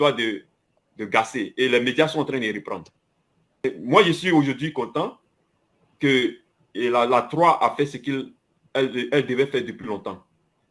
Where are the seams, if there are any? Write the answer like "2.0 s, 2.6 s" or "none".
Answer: none